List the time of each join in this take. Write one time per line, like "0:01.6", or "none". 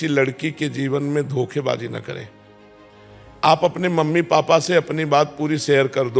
none

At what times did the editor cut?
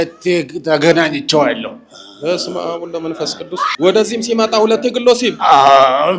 0:03.6

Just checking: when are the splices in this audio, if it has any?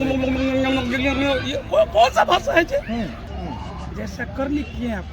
0:03.3

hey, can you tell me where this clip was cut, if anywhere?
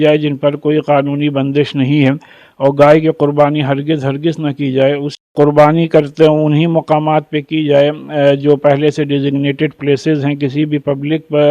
0:05.3

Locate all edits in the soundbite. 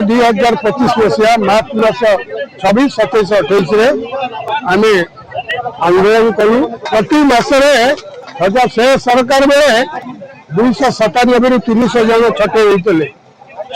0:06.8

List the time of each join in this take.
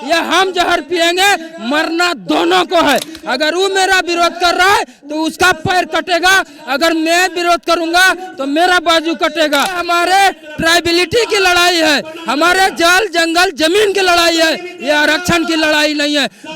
0:09.8

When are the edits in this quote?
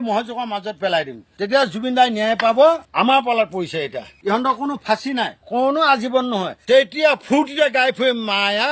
0:02.8
0:04.1
0:06.5

